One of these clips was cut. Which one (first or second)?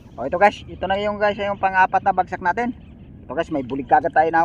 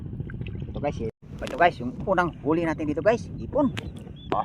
second